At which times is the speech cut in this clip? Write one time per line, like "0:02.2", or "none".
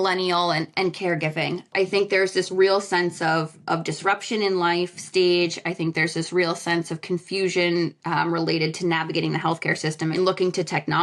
0:01.7
0:10.1